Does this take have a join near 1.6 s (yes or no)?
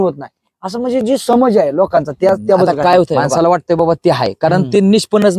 no